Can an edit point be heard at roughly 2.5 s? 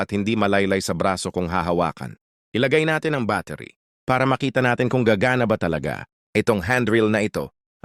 no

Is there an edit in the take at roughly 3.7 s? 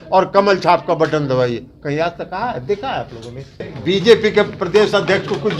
yes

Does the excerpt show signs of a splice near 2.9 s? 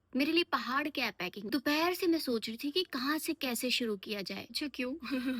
no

